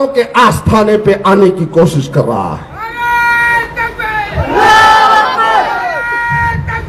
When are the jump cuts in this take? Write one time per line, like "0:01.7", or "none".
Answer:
none